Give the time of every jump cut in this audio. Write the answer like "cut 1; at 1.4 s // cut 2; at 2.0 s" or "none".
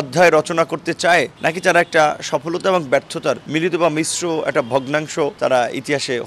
cut 1; at 1.3 s // cut 2; at 3.4 s // cut 3; at 5.3 s